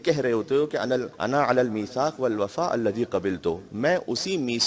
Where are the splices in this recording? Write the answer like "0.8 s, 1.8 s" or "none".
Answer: 1.1 s